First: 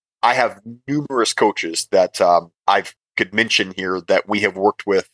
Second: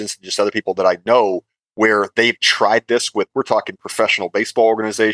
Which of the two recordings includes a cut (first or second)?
first